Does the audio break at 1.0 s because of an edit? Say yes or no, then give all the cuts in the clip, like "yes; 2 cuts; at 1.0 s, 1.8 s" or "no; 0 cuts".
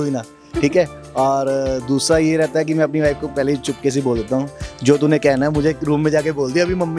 no; 0 cuts